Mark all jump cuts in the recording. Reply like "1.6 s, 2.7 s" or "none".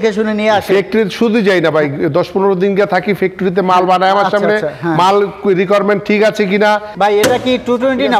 6.9 s